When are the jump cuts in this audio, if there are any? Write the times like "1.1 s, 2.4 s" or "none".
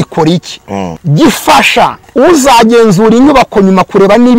1.0 s, 2.0 s

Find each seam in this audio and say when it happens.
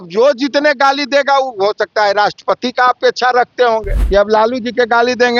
3.9 s

